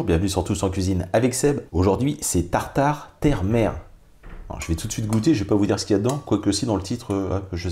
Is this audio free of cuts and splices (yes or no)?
no